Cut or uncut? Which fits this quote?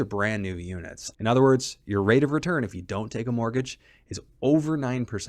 cut